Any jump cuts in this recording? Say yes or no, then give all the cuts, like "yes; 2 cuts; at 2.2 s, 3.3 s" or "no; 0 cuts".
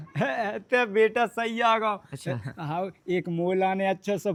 no; 0 cuts